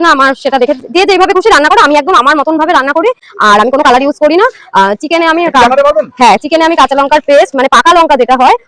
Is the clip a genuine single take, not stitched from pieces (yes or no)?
yes